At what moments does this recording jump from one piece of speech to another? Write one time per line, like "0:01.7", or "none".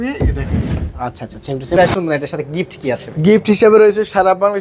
0:01.7